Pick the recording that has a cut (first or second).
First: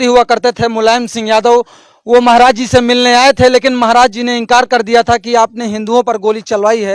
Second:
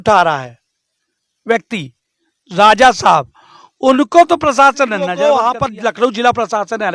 second